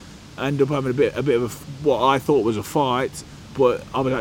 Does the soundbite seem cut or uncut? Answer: cut